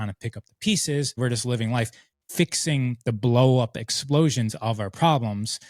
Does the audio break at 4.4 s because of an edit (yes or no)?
no